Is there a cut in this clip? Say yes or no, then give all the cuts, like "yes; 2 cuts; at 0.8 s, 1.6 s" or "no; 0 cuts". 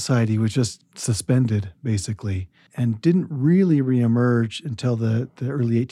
no; 0 cuts